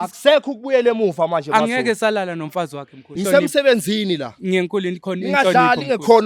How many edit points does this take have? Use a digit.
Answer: 1